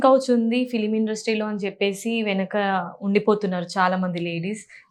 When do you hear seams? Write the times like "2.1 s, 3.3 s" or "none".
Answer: none